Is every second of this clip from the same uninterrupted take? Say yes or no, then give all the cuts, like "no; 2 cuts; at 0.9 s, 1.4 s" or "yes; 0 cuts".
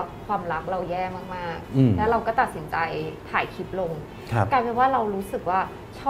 yes; 0 cuts